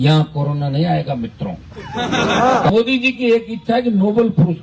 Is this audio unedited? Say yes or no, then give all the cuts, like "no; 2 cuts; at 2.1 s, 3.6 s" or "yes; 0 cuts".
no; 1 cut; at 2.7 s